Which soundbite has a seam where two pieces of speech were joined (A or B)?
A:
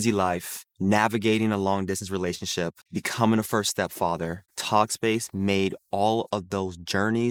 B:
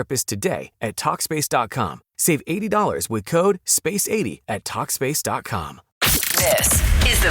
B